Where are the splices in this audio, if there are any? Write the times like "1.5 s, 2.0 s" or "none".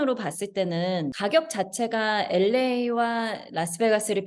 1.1 s